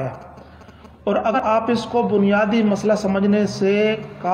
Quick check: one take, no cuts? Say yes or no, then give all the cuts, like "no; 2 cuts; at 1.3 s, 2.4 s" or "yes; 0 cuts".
no; 1 cut; at 1.4 s